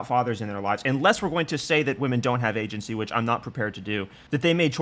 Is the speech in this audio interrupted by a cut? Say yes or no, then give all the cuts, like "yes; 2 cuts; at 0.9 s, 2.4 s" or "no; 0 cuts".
no; 0 cuts